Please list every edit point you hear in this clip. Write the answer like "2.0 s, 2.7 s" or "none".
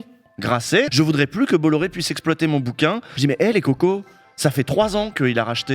0.9 s, 3.1 s